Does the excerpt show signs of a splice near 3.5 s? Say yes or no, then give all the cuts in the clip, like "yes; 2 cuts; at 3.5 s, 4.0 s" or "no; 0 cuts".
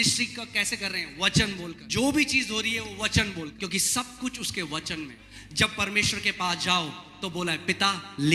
yes; 3 cuts; at 1.8 s, 3.5 s, 5.2 s